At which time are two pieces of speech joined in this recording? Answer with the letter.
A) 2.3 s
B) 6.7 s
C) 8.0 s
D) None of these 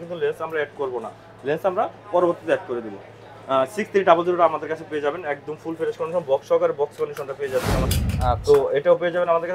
C